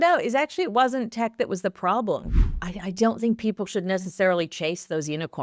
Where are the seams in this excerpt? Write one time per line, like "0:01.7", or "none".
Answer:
0:02.5